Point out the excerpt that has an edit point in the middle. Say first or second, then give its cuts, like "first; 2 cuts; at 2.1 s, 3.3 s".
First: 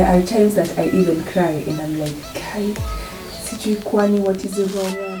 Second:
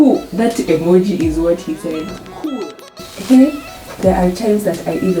second; 1 cut; at 3.1 s